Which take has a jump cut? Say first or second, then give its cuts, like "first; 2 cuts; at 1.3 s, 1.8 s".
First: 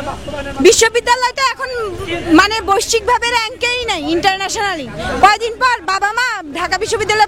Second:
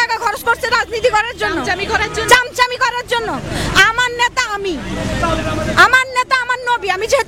second; 1 cut; at 5.4 s